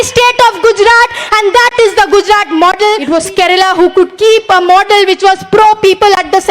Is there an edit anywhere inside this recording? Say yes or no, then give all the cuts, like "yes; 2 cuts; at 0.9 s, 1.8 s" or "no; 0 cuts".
yes; 1 cut; at 3.0 s